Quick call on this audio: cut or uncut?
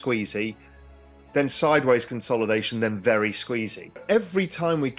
cut